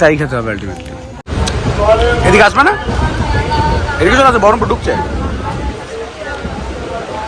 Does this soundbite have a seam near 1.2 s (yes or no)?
yes